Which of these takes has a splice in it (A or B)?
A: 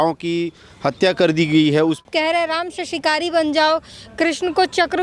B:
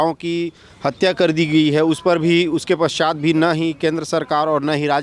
A